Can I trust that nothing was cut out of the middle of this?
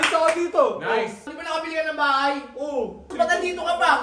no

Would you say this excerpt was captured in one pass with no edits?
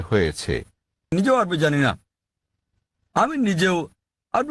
no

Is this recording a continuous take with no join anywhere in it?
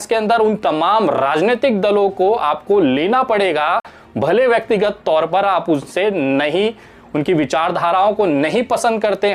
yes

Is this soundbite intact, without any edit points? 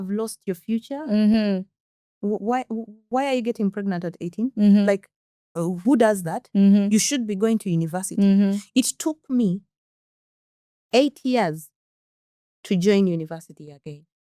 yes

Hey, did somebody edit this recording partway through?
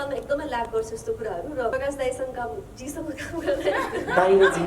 yes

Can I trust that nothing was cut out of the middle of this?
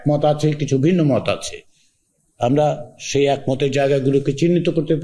yes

